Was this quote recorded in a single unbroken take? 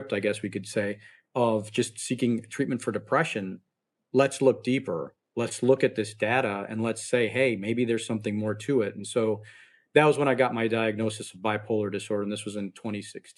yes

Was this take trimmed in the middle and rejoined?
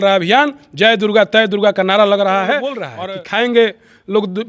yes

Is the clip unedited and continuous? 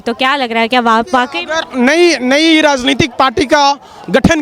yes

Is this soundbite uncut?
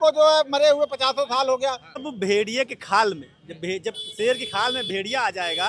no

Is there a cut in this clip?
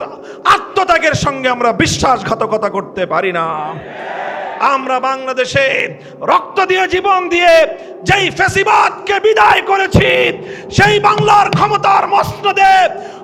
no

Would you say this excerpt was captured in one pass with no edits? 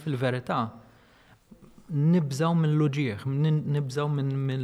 yes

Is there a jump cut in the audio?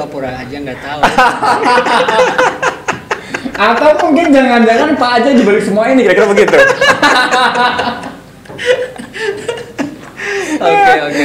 no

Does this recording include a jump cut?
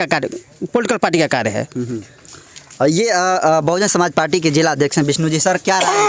no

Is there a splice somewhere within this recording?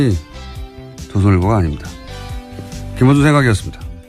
no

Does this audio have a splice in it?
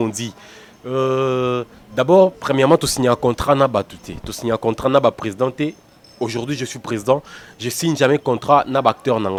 no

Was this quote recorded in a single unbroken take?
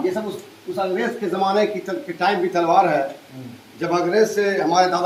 yes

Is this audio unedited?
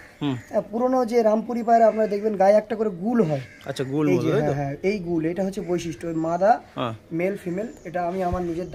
yes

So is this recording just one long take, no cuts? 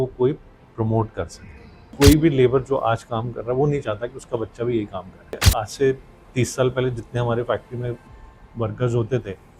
no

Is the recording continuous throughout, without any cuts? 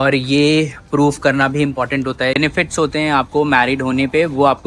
no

